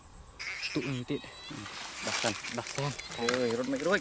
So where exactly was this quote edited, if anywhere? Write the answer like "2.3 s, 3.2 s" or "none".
none